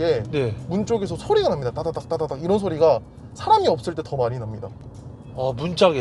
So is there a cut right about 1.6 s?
no; 0 cuts

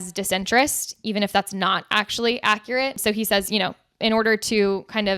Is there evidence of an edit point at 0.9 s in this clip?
no; 1 cut; at 3.0 s

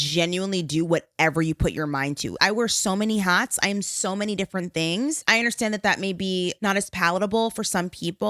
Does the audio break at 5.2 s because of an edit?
yes; 3 cuts; at 2.3 s, 5.2 s, 6.7 s

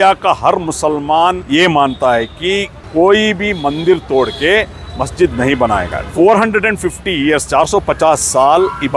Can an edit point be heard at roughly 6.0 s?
yes; 3 cuts; at 1.4 s, 2.8 s, 6.0 s

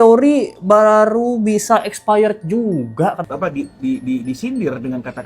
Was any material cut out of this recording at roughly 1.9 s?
no; 1 cut; at 3.2 s

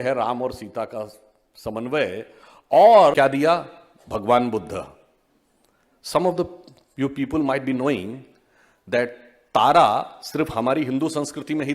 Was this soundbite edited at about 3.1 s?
yes; 1 cut; at 3.1 s

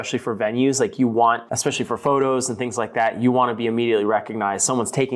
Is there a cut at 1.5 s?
yes; 1 cut; at 1.5 s

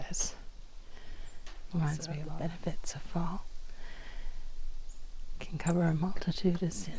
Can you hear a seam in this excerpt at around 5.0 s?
no; 1 cut; at 2.2 s

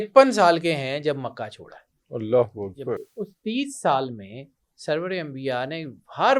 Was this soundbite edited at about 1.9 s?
no; 1 cut; at 3.1 s

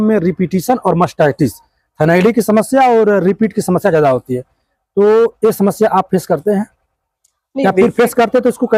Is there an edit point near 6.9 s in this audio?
no; 0 cuts

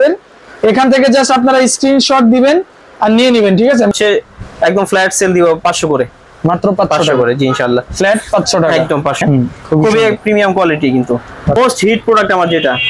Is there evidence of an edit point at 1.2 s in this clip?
no; 3 cuts; at 3.9 s, 9.2 s, 11.6 s

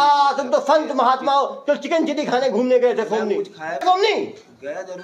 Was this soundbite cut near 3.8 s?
yes; 1 cut; at 3.8 s

